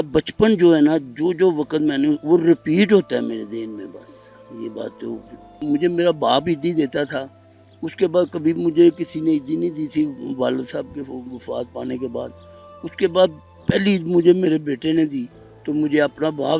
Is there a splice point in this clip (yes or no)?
yes